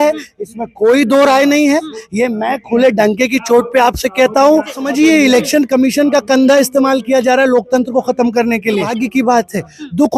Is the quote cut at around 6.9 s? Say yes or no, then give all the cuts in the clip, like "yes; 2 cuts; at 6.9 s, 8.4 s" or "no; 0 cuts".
no; 2 cuts; at 4.8 s, 9.0 s